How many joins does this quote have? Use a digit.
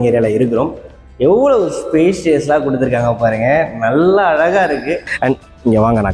1